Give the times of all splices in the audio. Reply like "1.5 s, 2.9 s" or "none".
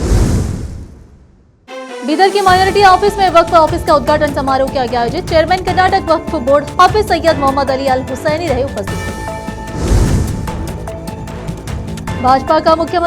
1.5 s